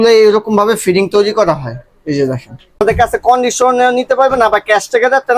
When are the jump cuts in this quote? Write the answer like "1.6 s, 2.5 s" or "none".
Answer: 2.8 s